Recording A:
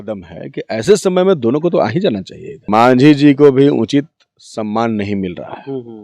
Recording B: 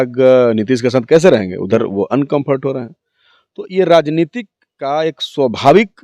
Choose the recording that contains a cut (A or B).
A